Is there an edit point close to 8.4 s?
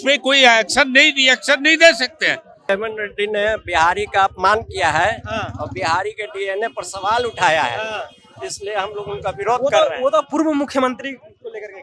no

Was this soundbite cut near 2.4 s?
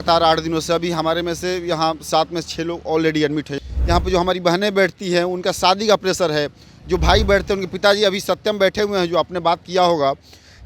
no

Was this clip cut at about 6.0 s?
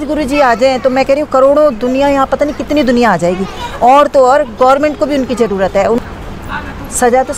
yes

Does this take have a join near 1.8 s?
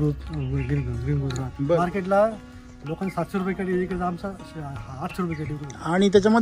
yes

